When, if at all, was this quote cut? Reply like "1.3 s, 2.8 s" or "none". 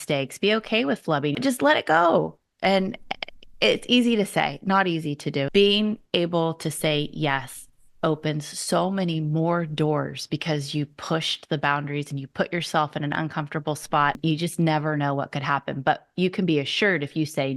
1.4 s, 5.5 s, 14.2 s